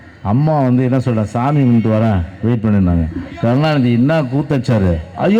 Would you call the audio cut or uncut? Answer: uncut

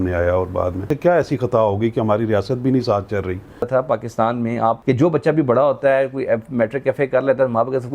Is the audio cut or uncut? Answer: cut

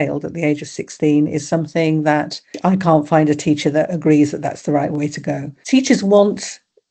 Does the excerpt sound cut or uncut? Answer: cut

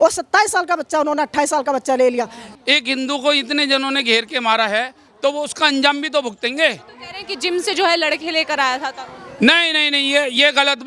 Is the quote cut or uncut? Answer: cut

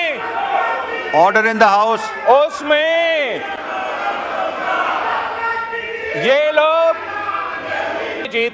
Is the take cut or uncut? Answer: uncut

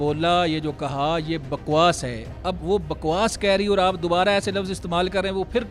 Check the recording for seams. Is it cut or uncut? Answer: uncut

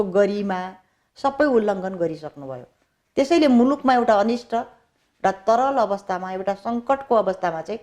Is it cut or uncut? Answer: uncut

